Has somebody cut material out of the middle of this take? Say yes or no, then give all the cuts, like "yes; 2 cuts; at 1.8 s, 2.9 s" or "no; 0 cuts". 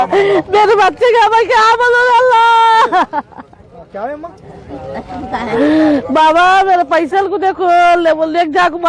no; 0 cuts